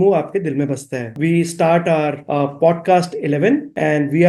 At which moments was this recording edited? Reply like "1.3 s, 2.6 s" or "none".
none